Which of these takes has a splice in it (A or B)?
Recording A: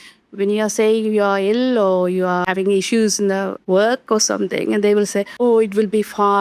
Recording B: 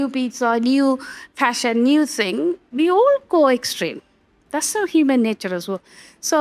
A